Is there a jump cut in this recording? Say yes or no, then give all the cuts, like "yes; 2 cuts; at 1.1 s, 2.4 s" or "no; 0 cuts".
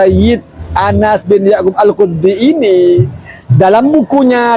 no; 0 cuts